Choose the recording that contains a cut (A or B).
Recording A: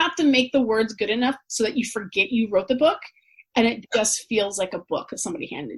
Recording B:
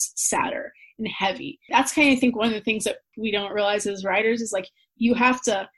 B